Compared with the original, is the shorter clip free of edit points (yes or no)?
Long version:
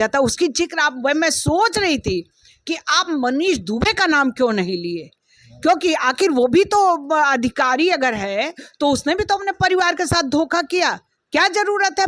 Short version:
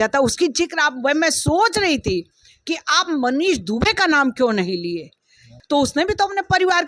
no